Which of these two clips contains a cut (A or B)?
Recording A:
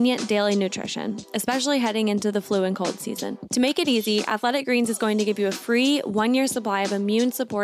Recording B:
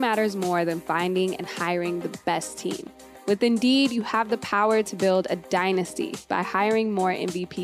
A